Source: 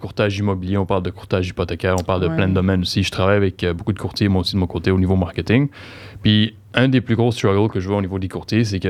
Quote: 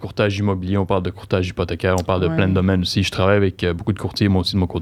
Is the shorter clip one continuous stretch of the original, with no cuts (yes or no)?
yes